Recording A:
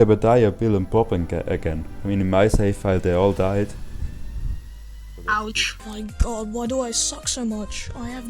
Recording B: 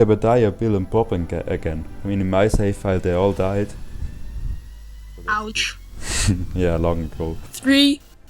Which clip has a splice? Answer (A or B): A